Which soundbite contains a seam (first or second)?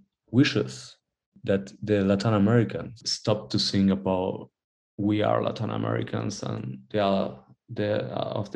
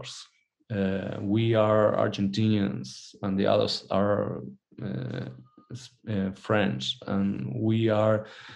first